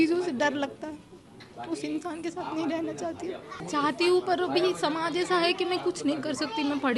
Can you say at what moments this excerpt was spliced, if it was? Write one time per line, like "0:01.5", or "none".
0:03.6